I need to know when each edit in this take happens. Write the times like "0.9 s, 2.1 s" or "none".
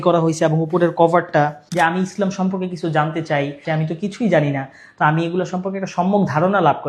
1.6 s